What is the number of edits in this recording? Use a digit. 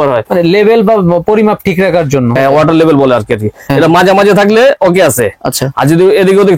1